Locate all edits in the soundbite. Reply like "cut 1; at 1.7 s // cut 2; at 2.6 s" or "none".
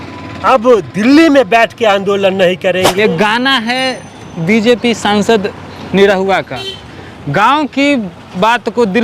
cut 1; at 2.9 s

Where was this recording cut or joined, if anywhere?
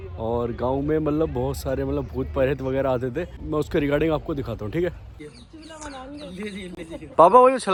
none

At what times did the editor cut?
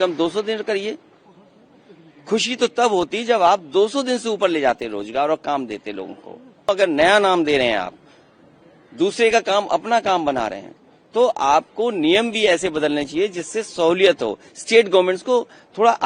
cut 1; at 6.7 s

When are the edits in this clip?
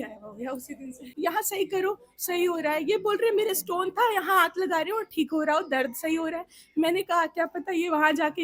cut 1; at 1.1 s

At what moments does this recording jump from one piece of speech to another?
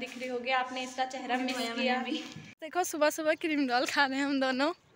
cut 1; at 2.6 s

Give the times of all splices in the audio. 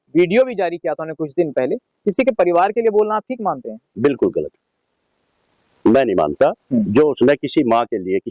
none

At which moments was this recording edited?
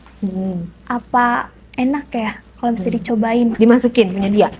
cut 1; at 3.5 s

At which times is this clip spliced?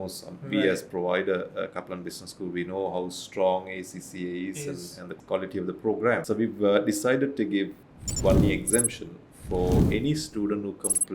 cut 1; at 5.0 s // cut 2; at 6.2 s // cut 3; at 7.8 s

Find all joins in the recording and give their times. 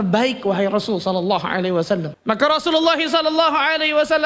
cut 1; at 2.1 s

